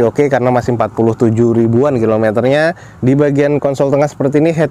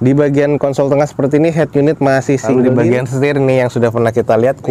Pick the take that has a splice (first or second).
second